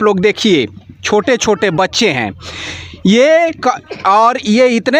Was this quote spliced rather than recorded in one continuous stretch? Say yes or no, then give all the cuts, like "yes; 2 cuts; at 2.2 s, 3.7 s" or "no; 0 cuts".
no; 0 cuts